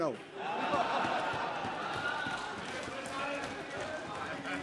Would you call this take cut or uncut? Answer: uncut